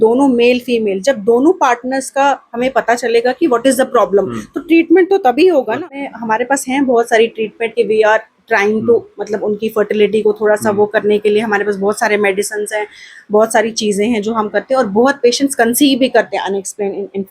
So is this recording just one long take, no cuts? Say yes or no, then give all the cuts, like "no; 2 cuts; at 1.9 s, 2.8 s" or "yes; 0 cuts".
no; 1 cut; at 6.0 s